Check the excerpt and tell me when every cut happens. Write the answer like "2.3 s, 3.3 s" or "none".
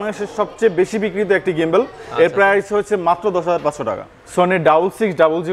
4.1 s